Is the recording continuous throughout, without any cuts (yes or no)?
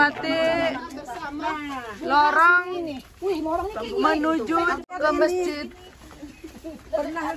no